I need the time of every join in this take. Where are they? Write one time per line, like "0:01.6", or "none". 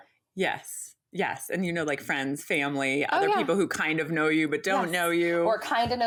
none